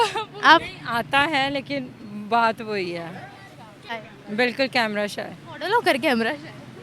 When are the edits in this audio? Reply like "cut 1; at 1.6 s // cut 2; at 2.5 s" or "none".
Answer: cut 1; at 4.0 s